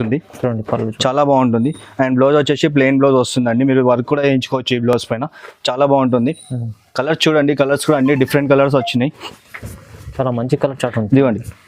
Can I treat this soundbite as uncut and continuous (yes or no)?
yes